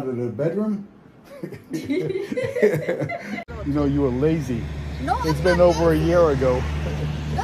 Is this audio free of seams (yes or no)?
no